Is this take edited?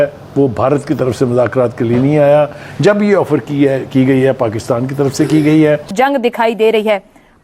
yes; 1 cut; at 5.9 s

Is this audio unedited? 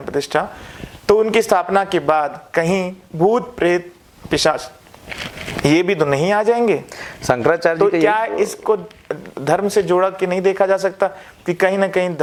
yes; 0 cuts

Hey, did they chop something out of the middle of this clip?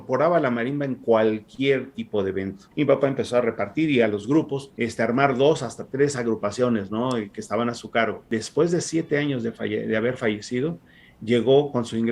yes; 3 cuts; at 2.6 s, 4.6 s, 8.2 s

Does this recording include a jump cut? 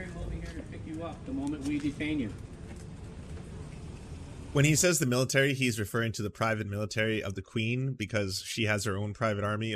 no; 0 cuts

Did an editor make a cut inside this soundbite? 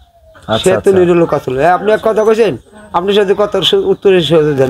no; 0 cuts

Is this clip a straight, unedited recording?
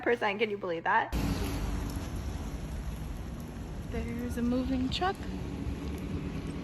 no; 1 cut; at 1.1 s

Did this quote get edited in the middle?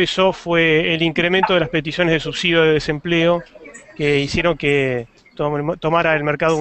yes; 1 cut; at 4.3 s

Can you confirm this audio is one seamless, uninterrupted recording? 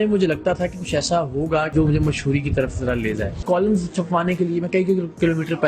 no; 2 cuts; at 1.7 s, 3.4 s

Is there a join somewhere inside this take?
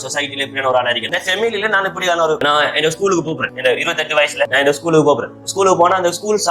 yes; 4 cuts; at 1.1 s, 2.4 s, 3.5 s, 4.5 s

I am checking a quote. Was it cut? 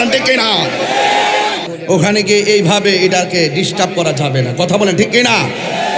yes; 1 cut; at 1.7 s

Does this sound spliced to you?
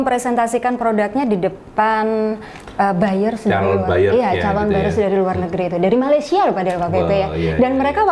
no; 0 cuts

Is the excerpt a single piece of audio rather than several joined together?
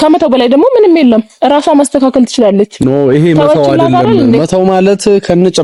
yes; 0 cuts

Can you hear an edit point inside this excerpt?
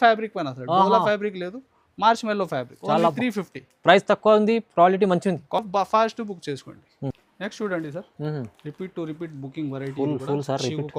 no; 0 cuts

